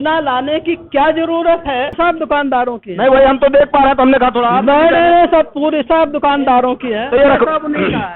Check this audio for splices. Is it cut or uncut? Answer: cut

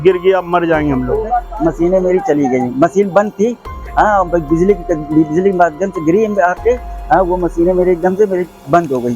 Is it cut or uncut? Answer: cut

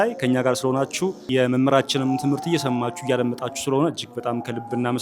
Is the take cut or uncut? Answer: cut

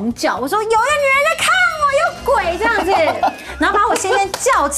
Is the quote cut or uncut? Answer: uncut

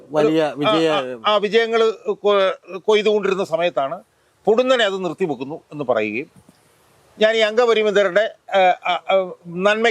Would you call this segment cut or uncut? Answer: uncut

